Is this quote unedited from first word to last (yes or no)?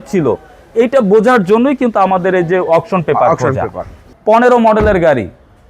no